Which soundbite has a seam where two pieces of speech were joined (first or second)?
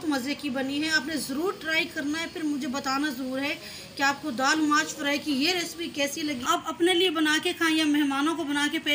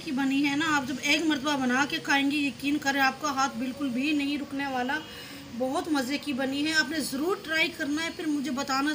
first